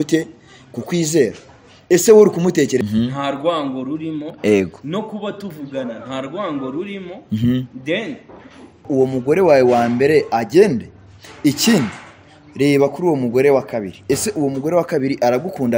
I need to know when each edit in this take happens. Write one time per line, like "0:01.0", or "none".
0:02.8
0:08.9